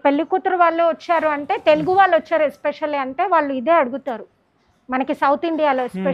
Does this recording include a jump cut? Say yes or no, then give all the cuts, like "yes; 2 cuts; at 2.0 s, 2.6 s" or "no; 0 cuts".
no; 0 cuts